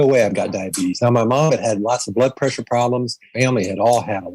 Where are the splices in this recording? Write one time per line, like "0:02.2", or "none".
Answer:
0:03.3